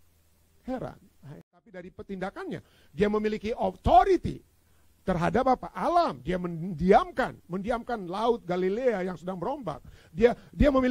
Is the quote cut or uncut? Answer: cut